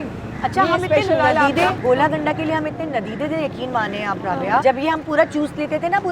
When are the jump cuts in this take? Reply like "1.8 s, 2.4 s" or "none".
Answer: 1.8 s, 4.6 s